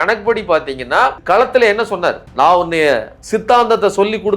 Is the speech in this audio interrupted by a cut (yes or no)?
yes